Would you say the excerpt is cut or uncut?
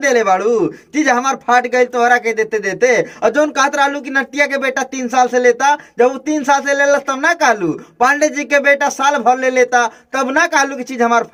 uncut